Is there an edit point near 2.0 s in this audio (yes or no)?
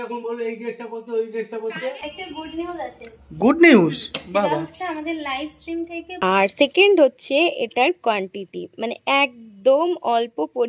yes